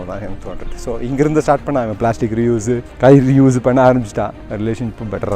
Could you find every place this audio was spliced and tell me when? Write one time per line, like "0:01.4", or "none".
0:02.9
0:04.4